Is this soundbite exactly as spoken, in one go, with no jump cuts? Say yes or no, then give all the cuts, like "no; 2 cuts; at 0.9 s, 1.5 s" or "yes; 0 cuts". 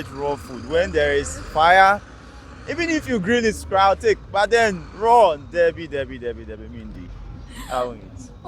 yes; 0 cuts